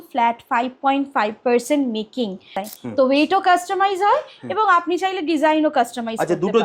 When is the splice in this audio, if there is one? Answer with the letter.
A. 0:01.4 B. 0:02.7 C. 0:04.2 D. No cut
B